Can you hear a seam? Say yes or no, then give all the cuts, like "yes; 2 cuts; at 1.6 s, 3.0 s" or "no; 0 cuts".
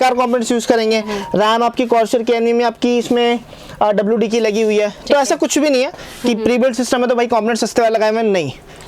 no; 0 cuts